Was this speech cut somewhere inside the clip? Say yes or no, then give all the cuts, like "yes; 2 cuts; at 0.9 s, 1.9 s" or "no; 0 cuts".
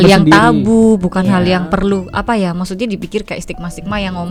no; 0 cuts